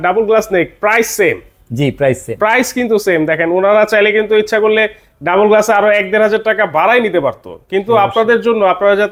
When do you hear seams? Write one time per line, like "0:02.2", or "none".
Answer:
none